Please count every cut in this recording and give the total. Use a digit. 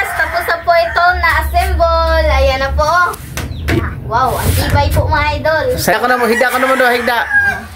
1